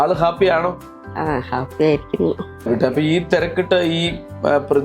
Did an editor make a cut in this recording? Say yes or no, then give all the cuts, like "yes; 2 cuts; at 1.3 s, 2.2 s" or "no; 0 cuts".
yes; 1 cut; at 2.7 s